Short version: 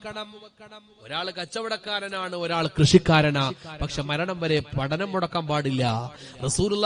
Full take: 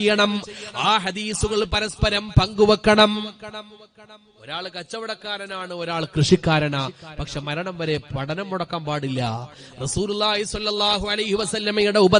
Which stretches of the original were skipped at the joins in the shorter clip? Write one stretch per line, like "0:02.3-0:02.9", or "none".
none